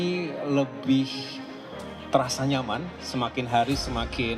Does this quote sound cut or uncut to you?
uncut